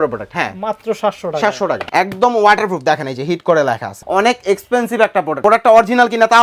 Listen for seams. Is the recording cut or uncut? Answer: cut